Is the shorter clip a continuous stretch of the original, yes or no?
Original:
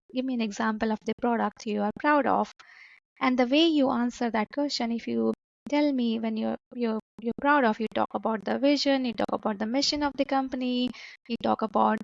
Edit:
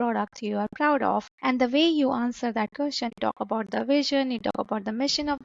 no